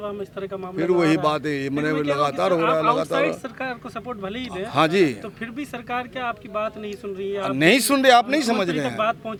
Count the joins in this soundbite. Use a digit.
0